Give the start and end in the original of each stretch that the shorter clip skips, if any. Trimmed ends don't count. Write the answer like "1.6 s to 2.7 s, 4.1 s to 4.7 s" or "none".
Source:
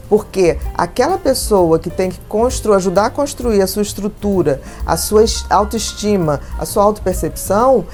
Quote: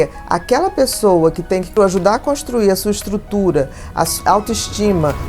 2.2 s to 2.6 s, 5.0 s to 5.4 s

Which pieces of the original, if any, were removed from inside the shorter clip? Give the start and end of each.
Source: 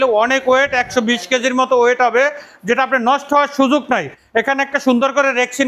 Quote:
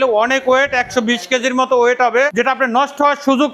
2.3 s to 2.6 s

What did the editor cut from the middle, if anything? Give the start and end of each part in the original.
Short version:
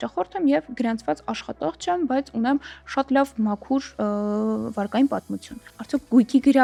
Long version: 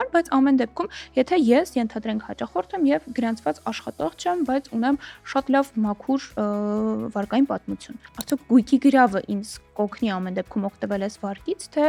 none

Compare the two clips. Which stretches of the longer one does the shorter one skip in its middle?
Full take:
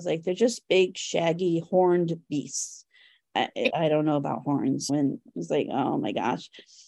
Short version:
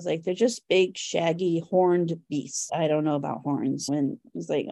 2.7 s to 3.7 s

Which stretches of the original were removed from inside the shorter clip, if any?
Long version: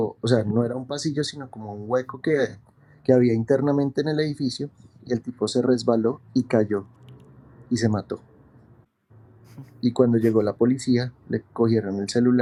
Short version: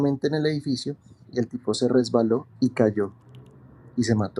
none

